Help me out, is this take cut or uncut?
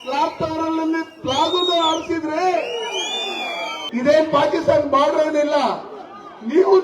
cut